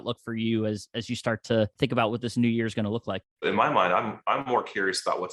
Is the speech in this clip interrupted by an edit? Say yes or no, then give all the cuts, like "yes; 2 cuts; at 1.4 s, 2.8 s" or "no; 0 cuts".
yes; 2 cuts; at 1.7 s, 3.4 s